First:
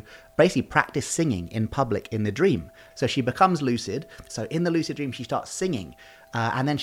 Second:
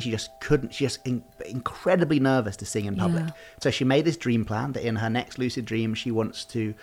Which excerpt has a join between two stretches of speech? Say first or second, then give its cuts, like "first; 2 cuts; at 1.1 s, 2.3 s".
first; 2 cuts; at 2.8 s, 4.2 s